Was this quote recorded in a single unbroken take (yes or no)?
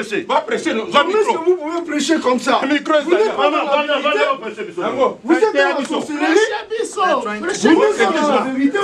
yes